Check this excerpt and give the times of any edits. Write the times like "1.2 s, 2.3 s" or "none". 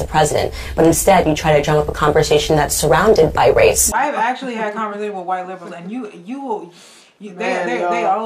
3.9 s